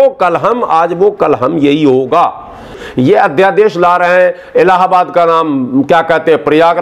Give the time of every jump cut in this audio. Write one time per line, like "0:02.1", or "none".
0:02.8